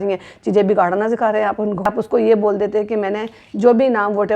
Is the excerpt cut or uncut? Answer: cut